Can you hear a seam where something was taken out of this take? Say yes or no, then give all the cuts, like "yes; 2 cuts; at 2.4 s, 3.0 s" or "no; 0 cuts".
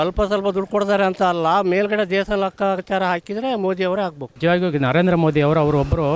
yes; 1 cut; at 4.2 s